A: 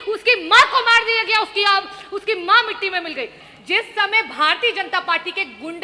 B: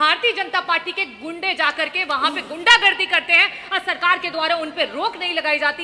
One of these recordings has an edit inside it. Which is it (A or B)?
A